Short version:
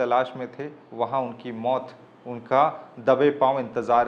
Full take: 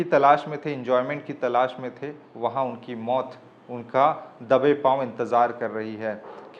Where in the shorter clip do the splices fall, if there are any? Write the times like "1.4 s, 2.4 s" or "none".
none

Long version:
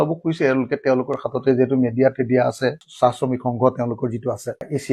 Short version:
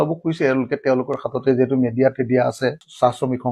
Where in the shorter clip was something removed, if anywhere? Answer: none

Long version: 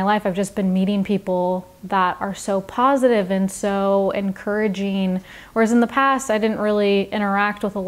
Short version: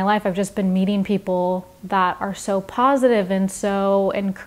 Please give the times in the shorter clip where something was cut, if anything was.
none

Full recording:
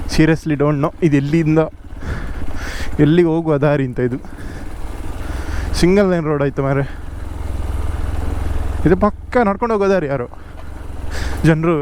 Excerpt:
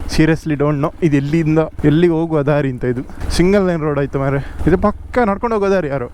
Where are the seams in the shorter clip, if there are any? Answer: 1.7 s, 3.2 s, 4.5 s

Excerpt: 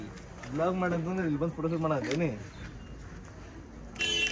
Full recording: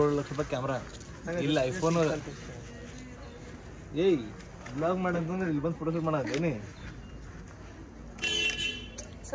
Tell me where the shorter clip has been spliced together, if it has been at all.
none

